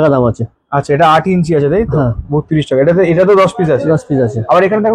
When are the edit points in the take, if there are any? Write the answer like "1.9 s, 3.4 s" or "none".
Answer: none